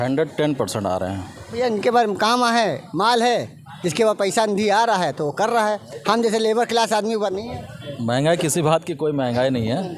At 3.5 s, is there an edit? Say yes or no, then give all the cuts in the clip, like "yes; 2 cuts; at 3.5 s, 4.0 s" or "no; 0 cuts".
no; 1 cut; at 1.4 s